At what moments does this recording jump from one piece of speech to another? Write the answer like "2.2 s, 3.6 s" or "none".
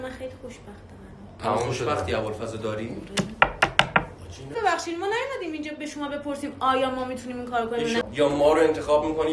4.5 s, 8.0 s